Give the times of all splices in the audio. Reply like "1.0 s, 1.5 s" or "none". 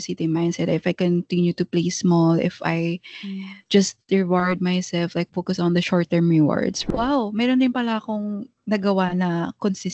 5.9 s, 6.8 s